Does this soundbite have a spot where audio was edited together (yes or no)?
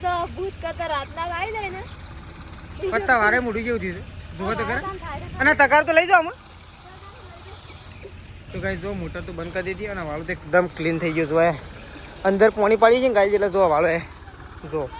no